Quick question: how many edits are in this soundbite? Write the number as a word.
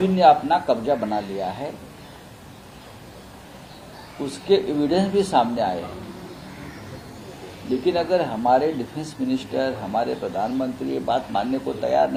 zero